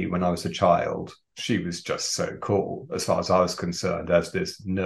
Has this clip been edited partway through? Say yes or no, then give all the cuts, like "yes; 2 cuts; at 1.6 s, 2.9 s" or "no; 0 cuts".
yes; 1 cut; at 1.3 s